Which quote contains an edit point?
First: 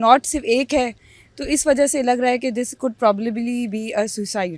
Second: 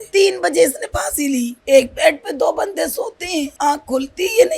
second; 2 cuts; at 1.5 s, 3.5 s

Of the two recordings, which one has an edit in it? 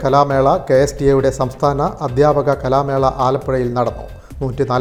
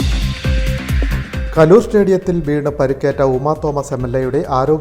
second; 1 cut; at 1.0 s

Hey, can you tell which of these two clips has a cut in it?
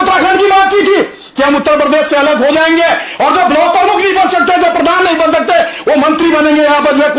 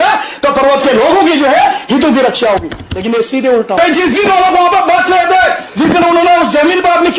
second; 1 cut; at 3.8 s

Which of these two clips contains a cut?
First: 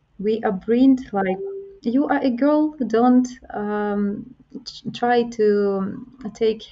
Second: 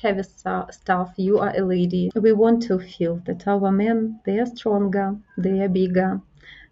second; 1 cut; at 2.1 s

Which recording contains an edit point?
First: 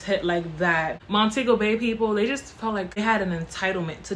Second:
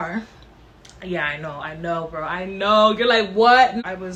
first; 2 cuts; at 1.0 s, 3.0 s

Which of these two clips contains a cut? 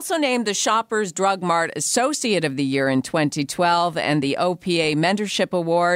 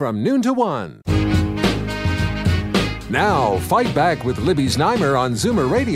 second; 1 cut; at 0.9 s

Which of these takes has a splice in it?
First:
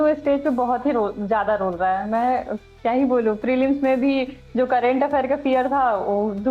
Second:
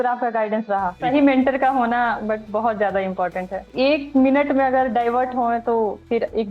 second; 2 cuts; at 1.1 s, 3.6 s

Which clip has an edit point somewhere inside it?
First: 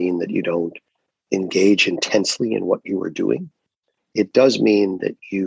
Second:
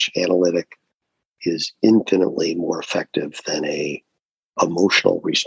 first; 1 cut; at 1.1 s

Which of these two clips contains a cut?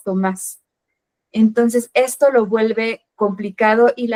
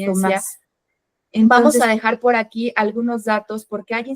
second; 1 cut; at 1.5 s

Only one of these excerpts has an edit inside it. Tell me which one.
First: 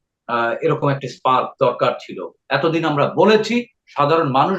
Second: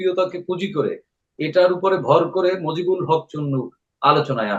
first; 1 cut; at 2.4 s

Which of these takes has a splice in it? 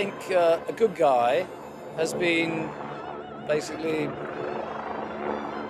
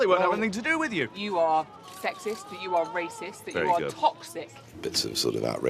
second; 2 cuts; at 1.1 s, 4.6 s

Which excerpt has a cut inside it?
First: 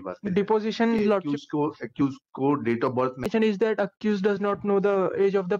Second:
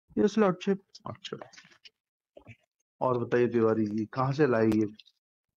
first; 1 cut; at 3.3 s

